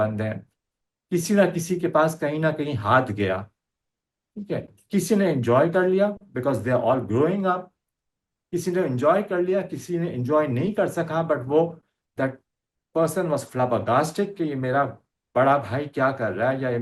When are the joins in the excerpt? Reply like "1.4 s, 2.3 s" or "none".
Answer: none